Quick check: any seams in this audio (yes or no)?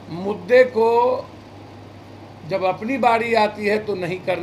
no